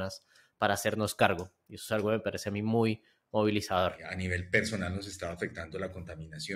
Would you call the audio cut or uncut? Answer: cut